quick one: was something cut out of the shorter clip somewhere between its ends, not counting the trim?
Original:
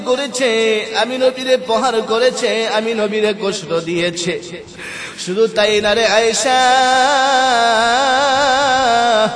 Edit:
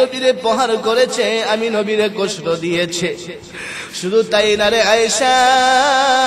no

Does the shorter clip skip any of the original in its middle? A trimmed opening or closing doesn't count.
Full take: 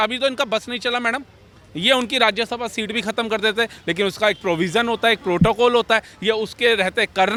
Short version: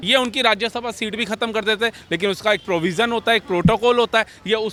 no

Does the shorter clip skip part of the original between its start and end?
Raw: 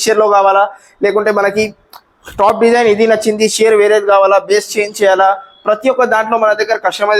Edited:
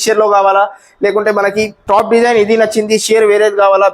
yes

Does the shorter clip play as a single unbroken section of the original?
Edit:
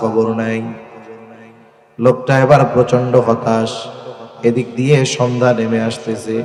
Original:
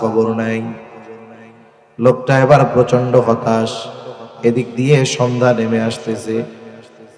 yes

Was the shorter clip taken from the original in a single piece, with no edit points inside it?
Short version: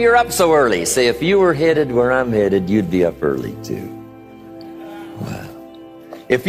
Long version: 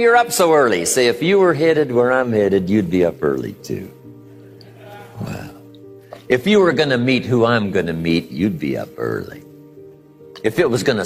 yes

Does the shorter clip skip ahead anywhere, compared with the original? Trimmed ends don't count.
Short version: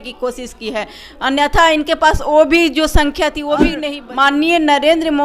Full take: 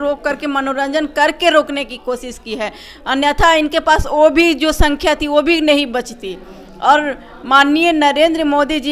yes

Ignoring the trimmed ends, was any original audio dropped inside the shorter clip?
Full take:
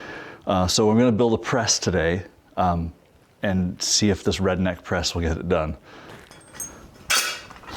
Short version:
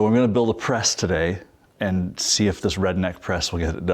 yes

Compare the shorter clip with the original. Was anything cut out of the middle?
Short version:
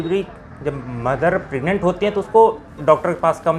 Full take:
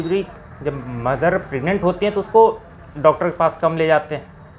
yes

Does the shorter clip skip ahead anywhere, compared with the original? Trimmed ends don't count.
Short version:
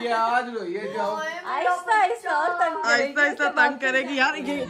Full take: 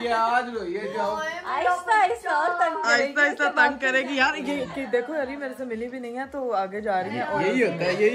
no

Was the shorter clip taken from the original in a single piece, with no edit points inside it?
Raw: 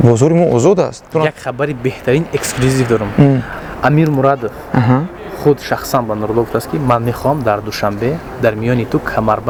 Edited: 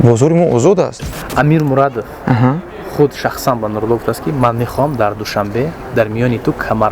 no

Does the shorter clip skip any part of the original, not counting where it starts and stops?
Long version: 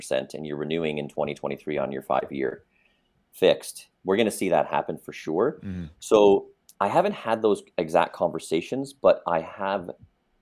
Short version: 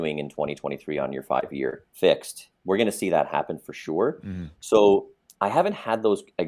yes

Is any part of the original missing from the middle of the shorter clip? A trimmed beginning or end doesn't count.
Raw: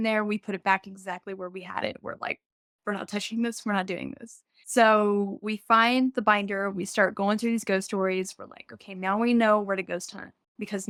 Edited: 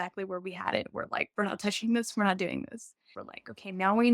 yes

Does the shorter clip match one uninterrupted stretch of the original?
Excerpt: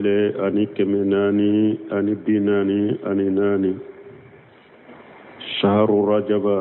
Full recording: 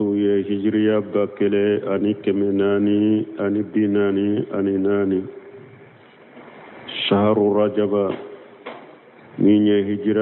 yes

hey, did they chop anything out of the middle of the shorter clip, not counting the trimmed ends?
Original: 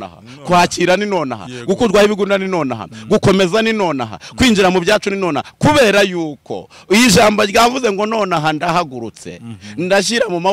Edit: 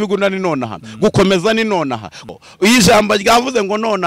yes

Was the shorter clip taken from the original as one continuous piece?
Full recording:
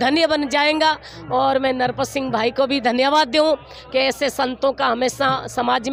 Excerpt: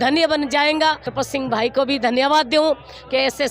no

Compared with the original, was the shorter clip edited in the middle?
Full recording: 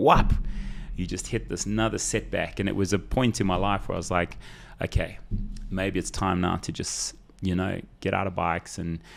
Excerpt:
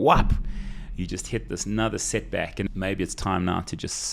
yes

